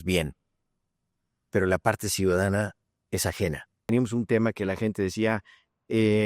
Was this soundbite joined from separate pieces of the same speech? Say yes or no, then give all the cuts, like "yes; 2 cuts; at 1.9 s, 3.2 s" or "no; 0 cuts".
yes; 1 cut; at 3.8 s